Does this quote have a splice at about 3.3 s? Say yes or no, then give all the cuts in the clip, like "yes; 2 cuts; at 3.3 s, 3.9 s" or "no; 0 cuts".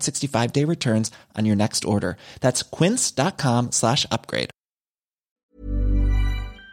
no; 1 cut; at 5.4 s